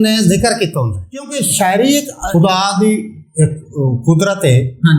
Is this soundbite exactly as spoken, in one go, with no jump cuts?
no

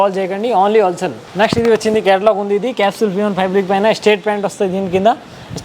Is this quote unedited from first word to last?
yes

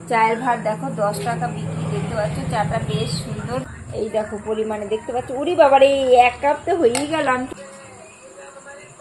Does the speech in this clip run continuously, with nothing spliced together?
no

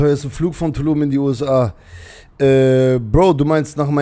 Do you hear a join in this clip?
no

